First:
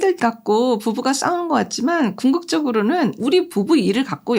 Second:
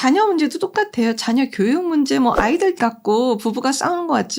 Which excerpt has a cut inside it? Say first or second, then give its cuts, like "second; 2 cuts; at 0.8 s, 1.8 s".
first; 1 cut; at 3.2 s